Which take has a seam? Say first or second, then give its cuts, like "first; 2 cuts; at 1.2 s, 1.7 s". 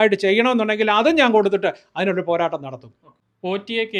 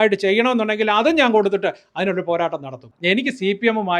second; 1 cut; at 2.9 s